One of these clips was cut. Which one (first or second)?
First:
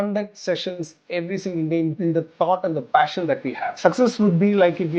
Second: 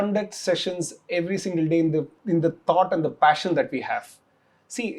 first